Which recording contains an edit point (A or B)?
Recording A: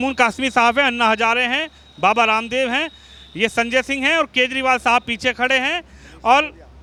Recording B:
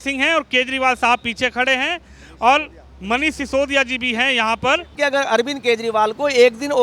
B